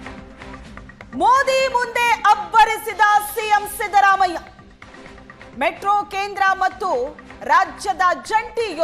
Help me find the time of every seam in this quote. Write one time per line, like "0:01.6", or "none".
0:01.0